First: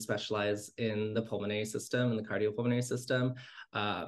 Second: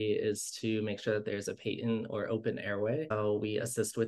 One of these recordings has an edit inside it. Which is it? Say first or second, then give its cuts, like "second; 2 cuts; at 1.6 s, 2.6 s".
second; 1 cut; at 3.1 s